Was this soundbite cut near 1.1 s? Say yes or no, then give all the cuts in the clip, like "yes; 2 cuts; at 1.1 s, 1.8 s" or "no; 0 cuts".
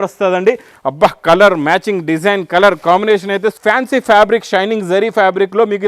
no; 1 cut; at 3.5 s